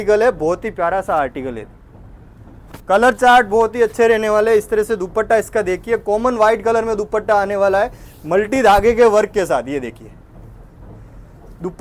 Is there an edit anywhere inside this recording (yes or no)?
no